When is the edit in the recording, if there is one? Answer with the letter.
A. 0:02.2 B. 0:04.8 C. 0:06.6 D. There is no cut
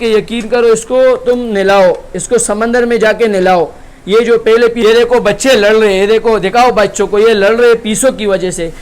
B